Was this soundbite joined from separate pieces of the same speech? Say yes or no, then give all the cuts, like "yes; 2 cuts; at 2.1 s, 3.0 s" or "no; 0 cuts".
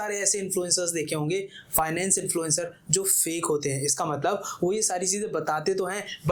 no; 0 cuts